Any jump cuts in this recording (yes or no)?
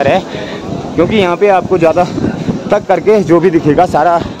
no